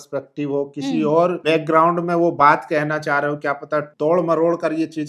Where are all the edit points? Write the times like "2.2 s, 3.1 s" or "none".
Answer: 1.4 s, 3.9 s